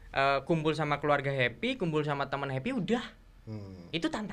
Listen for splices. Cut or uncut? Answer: uncut